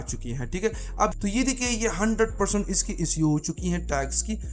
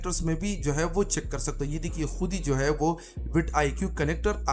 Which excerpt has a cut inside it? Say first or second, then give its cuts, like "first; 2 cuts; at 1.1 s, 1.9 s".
first; 1 cut; at 1.2 s